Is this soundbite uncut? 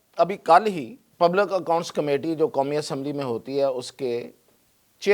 no; 1 cut; at 1.0 s

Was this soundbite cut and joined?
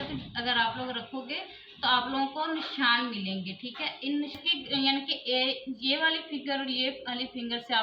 yes; 1 cut; at 4.4 s

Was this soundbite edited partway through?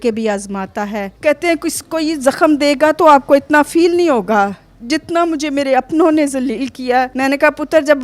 yes; 2 cuts; at 1.1 s, 7.1 s

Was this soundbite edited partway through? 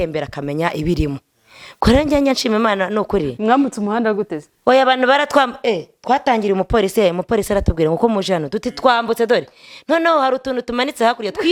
no; 0 cuts

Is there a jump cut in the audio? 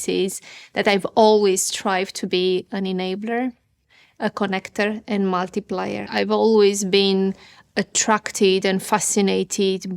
yes; 1 cut; at 6.1 s

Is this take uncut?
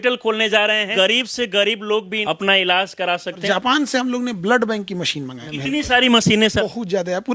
no; 5 cuts; at 0.9 s, 2.1 s, 3.4 s, 5.4 s, 6.6 s

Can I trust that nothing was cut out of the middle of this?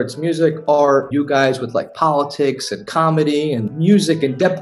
no; 2 cuts; at 1.1 s, 3.6 s

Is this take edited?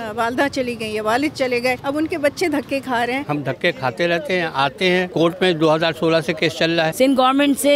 yes; 4 cuts; at 1.8 s, 3.2 s, 5.1 s, 6.9 s

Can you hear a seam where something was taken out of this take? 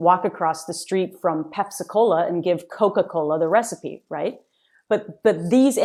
no; 0 cuts

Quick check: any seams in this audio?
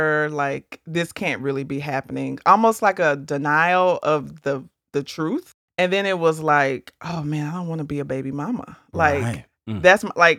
yes; 1 cut; at 5.5 s

